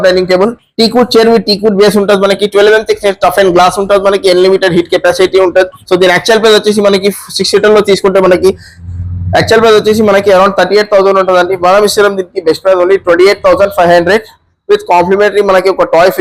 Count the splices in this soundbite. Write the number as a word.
zero